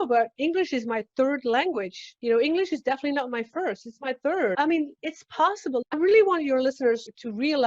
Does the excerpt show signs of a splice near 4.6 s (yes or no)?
yes